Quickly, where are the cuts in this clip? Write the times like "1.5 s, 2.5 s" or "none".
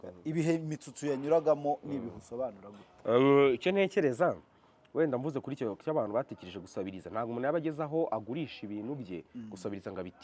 none